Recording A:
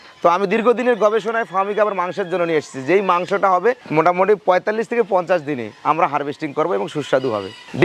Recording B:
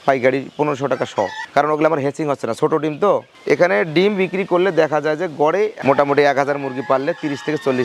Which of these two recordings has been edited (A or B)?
B